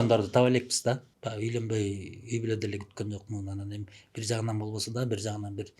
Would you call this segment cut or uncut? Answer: cut